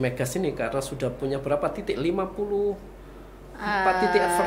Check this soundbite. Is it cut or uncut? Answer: uncut